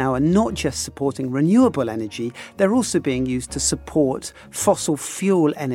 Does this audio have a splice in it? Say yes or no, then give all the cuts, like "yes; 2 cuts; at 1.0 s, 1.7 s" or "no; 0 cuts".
no; 0 cuts